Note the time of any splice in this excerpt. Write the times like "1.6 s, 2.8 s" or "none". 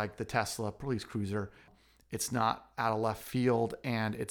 1.7 s